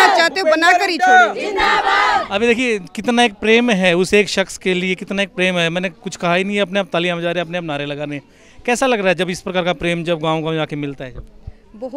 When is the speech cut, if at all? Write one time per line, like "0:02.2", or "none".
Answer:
none